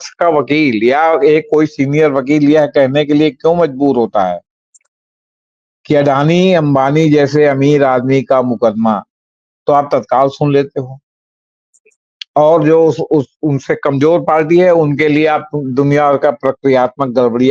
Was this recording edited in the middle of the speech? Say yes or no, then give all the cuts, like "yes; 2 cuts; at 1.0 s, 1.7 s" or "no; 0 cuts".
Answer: no; 0 cuts